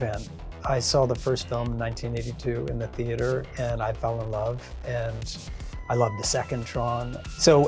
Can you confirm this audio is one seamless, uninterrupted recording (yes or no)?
yes